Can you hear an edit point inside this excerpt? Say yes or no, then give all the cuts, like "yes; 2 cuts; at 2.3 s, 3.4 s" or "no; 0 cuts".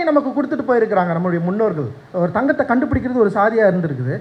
yes; 1 cut; at 2.0 s